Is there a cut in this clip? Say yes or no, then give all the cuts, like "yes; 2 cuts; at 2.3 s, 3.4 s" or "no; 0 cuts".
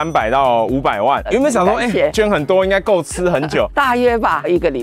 yes; 3 cuts; at 1.3 s, 2.1 s, 3.7 s